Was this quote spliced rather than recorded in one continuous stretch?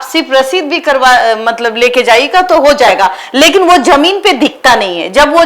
no; 0 cuts

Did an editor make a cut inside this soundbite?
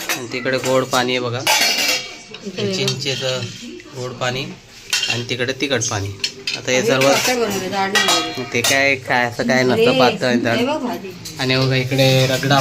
no; 0 cuts

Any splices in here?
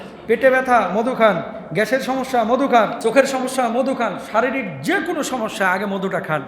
yes; 1 cut; at 3.0 s

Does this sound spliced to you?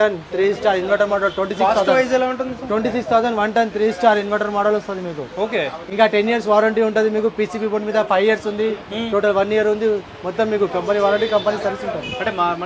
no; 0 cuts

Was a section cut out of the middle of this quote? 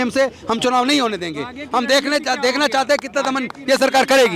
no; 0 cuts

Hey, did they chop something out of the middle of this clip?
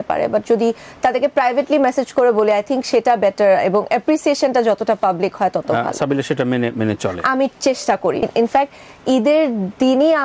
yes; 1 cut; at 8.3 s

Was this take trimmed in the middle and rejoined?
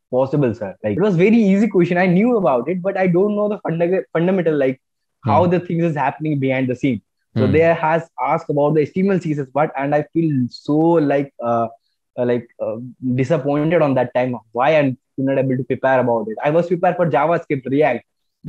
yes; 1 cut; at 0.9 s

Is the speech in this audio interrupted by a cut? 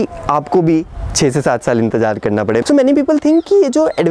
yes; 1 cut; at 2.6 s

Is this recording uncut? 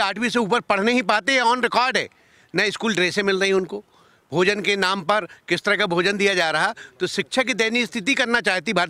yes; 0 cuts

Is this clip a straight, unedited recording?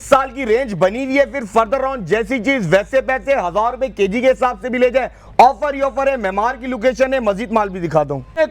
yes; 0 cuts

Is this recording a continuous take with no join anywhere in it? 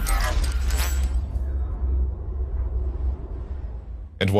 yes; 0 cuts

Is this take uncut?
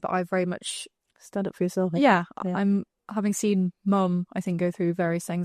yes; 0 cuts

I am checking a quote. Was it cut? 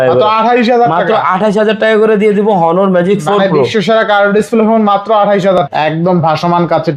yes; 1 cut; at 5.6 s

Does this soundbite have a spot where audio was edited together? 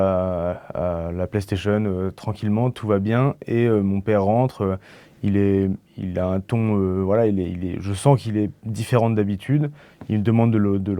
no; 0 cuts

